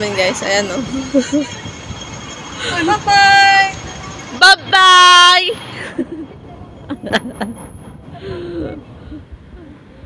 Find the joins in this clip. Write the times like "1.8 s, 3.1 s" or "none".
none

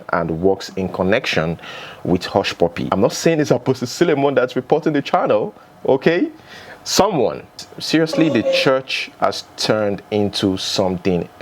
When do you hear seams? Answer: 2.9 s, 7.6 s

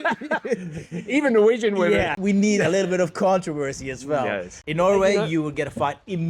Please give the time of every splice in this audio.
2.1 s, 4.5 s

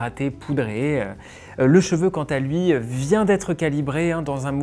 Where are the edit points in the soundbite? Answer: none

